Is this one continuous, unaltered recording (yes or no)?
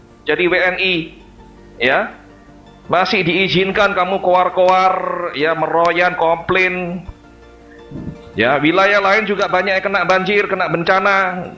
yes